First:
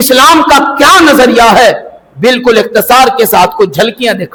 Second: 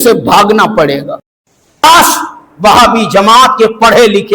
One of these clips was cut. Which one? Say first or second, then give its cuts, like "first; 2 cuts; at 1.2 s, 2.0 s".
second; 1 cut; at 1.8 s